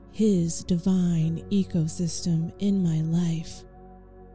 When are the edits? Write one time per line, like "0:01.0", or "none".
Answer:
0:03.4